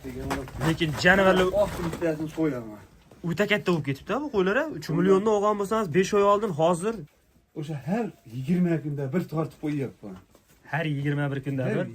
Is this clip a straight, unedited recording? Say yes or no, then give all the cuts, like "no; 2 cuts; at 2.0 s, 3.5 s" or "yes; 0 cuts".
no; 1 cut; at 7.1 s